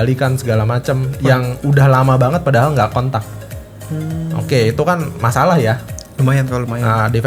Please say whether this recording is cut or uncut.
uncut